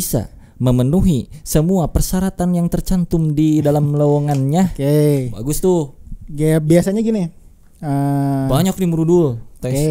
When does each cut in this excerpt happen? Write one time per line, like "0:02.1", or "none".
none